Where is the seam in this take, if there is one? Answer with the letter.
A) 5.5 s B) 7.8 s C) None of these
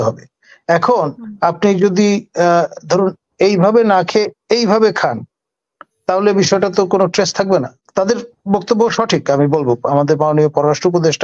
B